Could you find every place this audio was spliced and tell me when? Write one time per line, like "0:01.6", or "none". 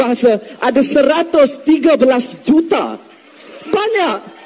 none